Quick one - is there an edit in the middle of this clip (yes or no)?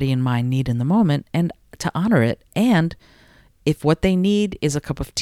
no